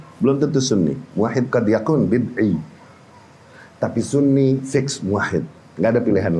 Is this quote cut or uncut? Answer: uncut